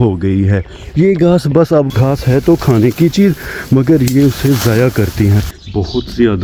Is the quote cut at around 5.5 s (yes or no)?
yes